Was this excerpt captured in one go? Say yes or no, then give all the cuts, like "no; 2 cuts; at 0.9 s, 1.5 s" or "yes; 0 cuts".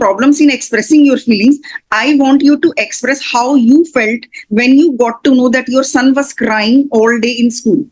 yes; 0 cuts